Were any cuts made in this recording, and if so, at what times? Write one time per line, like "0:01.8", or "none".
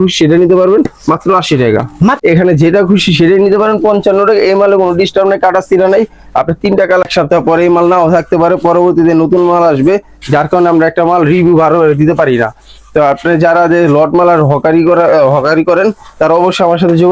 0:02.2
0:07.0